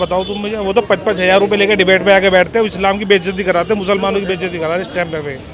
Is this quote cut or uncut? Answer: uncut